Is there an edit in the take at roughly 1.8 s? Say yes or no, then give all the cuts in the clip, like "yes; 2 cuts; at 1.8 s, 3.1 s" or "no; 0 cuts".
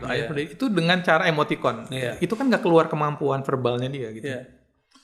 no; 0 cuts